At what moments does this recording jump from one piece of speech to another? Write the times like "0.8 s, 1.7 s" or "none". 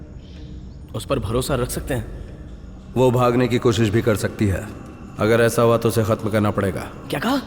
none